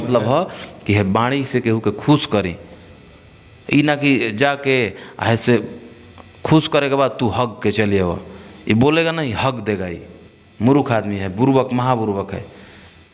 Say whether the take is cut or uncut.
uncut